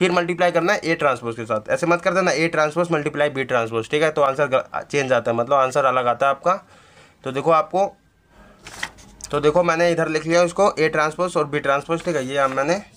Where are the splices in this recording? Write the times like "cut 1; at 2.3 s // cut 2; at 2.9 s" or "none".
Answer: none